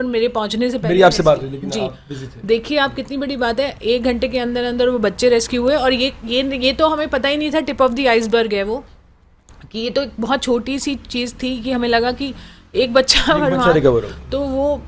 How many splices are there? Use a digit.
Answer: 0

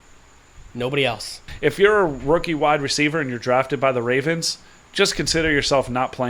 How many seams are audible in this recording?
1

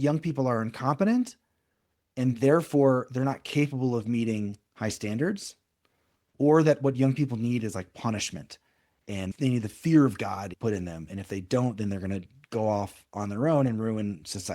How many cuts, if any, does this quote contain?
2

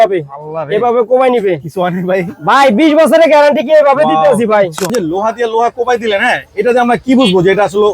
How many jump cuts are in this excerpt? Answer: 1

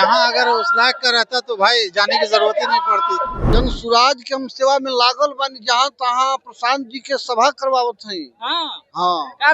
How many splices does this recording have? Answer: 1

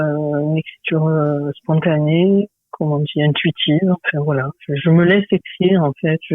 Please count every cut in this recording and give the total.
1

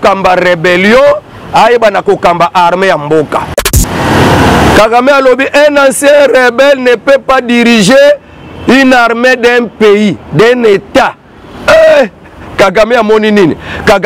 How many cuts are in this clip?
1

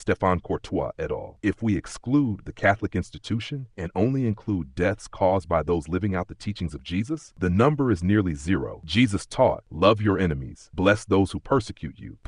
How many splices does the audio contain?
1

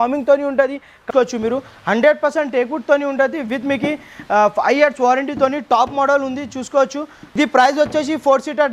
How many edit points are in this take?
2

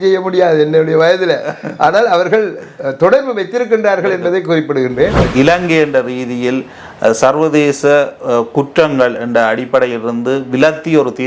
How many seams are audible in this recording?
1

